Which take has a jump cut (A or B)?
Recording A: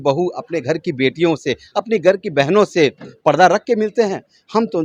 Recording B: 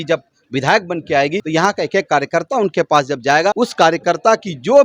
B